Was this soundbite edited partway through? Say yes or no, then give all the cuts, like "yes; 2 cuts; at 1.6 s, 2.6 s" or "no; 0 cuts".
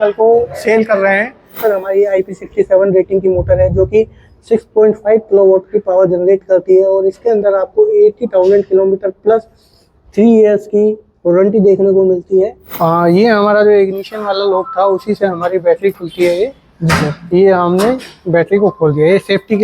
yes; 2 cuts; at 1.6 s, 12.6 s